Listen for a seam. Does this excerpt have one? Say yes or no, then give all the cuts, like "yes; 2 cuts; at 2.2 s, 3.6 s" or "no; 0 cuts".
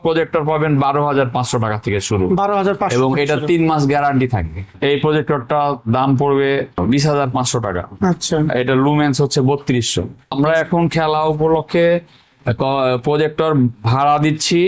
yes; 2 cuts; at 4.7 s, 10.3 s